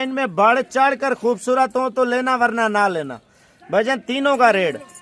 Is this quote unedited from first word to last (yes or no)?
yes